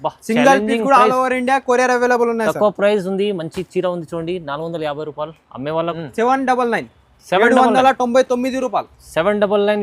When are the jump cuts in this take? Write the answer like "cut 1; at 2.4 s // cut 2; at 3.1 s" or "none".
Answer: cut 1; at 6.0 s